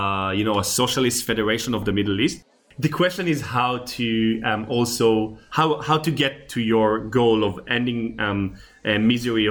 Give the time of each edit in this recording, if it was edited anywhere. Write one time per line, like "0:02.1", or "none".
0:02.5
0:05.4